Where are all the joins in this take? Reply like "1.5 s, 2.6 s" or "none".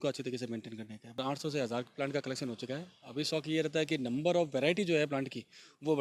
1.2 s